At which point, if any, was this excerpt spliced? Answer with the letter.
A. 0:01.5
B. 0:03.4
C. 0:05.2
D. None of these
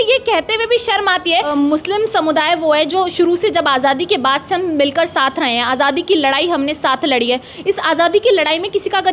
A